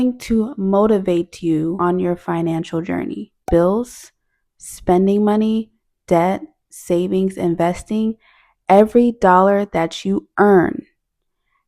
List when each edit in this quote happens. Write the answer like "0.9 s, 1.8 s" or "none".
1.8 s, 3.4 s